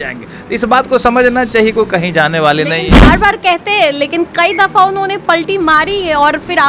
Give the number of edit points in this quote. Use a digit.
0